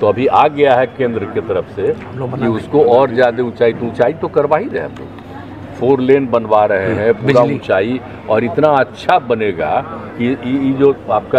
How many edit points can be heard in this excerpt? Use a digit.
0